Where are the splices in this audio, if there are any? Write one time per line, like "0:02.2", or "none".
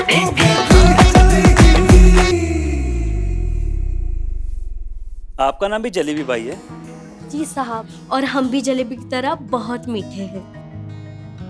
0:02.3